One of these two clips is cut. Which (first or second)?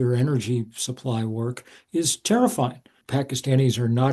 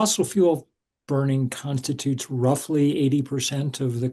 first